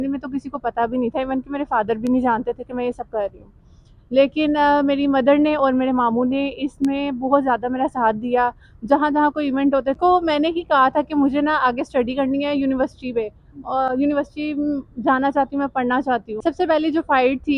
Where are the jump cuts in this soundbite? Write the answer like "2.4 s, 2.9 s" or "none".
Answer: 10.0 s, 16.4 s